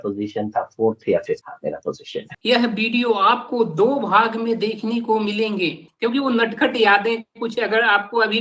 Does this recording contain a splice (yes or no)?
yes